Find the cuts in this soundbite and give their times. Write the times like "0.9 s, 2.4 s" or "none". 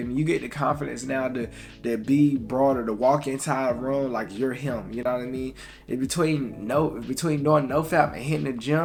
none